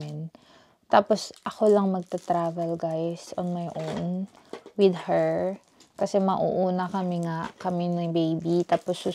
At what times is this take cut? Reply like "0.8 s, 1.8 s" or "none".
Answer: none